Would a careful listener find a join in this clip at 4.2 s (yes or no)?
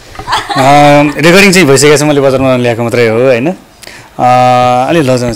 no